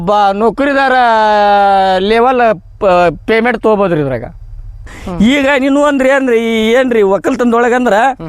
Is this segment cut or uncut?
cut